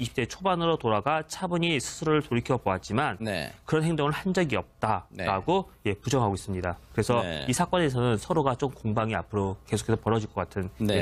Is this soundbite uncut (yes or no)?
yes